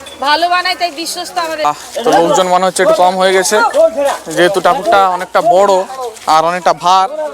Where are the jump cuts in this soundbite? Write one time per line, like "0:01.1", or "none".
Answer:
0:01.6